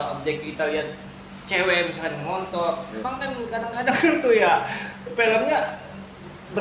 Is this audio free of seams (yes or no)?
no